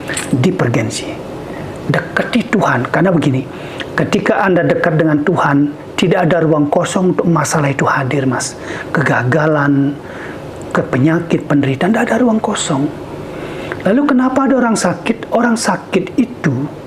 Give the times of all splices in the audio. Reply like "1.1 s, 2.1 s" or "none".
none